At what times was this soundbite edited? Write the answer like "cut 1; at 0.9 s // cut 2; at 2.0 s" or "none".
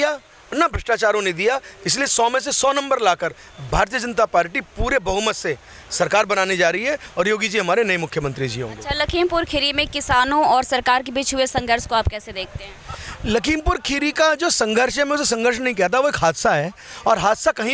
none